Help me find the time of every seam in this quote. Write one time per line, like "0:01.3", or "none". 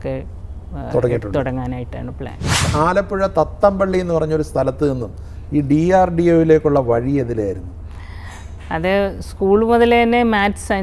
0:02.6